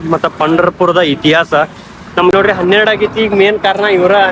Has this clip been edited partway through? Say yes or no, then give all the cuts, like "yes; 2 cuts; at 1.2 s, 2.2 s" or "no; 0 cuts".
yes; 1 cut; at 2.3 s